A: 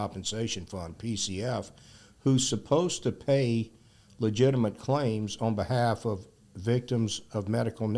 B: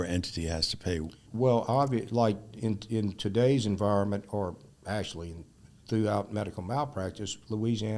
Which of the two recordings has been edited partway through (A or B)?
B